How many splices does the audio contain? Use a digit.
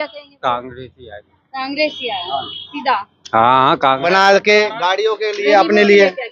1